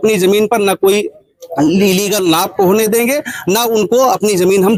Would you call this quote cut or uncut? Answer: uncut